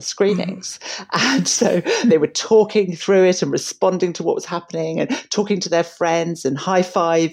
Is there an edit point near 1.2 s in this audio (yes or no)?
no